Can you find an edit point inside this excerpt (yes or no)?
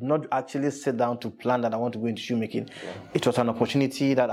no